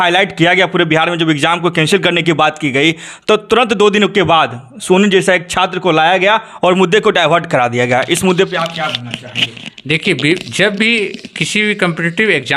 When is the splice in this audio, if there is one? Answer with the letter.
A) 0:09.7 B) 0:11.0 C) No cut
C